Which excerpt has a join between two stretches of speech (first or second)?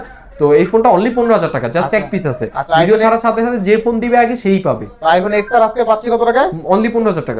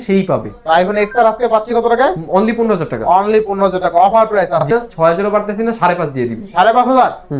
second